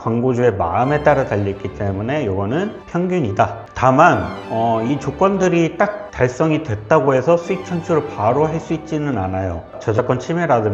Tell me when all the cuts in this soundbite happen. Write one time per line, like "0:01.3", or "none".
0:03.6
0:09.8